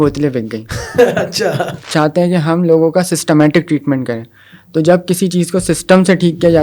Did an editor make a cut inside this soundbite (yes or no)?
yes